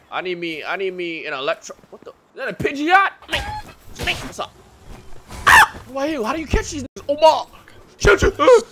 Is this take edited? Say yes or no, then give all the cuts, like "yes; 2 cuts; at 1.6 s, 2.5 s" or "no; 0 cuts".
yes; 3 cuts; at 3.2 s, 4.3 s, 5.9 s